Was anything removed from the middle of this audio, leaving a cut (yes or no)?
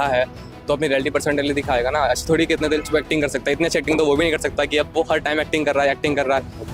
no